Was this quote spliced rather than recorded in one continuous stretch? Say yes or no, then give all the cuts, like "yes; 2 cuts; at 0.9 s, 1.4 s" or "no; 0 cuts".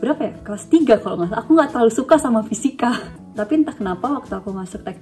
yes; 1 cut; at 3.2 s